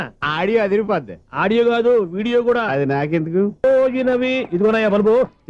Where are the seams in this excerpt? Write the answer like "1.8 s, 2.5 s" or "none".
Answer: 3.9 s